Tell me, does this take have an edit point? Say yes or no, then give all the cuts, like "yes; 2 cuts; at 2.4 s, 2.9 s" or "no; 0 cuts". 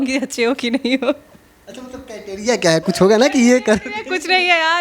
no; 0 cuts